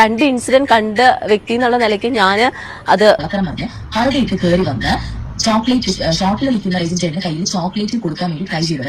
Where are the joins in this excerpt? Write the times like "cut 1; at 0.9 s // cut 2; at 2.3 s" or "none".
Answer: cut 1; at 3.2 s